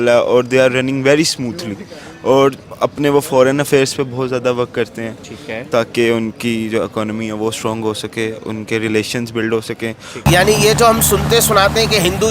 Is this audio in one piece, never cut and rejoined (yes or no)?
no